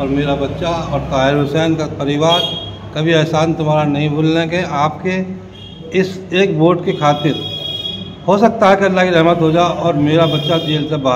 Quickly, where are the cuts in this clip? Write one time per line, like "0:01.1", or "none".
none